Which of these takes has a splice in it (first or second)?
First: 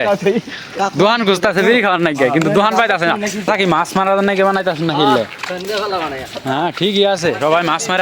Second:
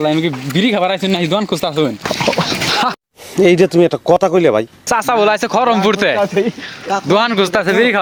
first